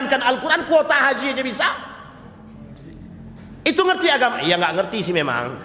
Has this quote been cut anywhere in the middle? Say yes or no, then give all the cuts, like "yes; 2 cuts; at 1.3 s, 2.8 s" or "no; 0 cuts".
no; 0 cuts